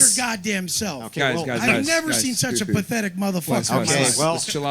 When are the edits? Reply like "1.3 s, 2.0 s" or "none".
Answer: none